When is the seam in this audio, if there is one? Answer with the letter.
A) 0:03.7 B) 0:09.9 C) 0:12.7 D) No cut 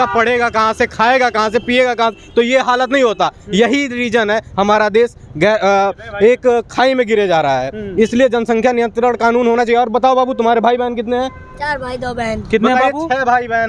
D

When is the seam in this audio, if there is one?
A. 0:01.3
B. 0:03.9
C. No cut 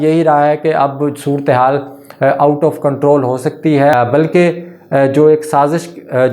B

